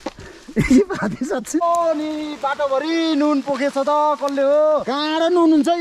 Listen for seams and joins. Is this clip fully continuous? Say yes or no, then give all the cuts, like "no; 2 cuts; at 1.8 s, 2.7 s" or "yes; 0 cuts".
no; 1 cut; at 1.6 s